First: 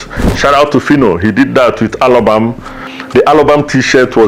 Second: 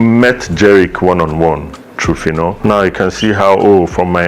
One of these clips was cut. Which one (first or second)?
second